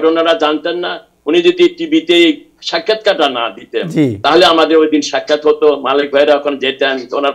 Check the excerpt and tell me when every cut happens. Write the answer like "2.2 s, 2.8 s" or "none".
none